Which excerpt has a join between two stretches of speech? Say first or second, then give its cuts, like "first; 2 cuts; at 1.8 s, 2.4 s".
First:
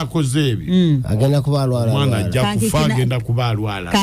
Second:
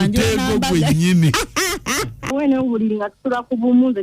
second; 1 cut; at 2.3 s